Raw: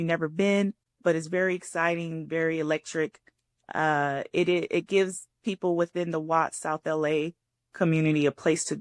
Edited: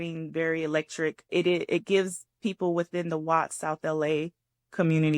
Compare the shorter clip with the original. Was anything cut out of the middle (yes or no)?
yes